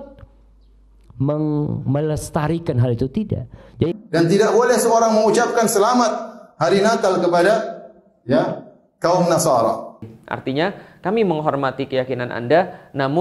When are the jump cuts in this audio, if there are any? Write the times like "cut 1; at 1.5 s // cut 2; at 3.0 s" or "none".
cut 1; at 3.9 s // cut 2; at 10.1 s